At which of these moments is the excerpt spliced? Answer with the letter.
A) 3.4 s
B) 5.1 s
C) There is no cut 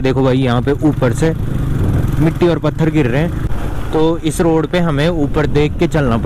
C